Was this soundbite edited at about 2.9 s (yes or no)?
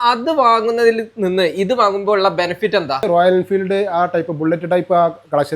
yes